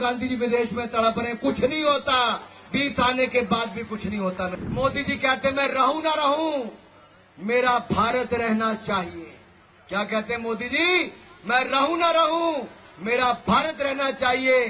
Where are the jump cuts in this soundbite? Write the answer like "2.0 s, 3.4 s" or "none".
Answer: 4.6 s